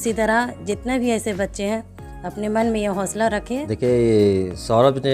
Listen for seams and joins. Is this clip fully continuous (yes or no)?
yes